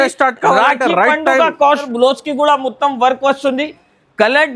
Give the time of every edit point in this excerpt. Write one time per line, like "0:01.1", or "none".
0:01.9